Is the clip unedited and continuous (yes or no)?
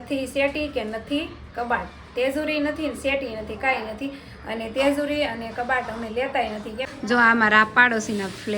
no